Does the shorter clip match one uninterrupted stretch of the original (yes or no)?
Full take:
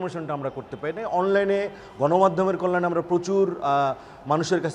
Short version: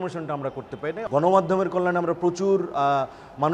no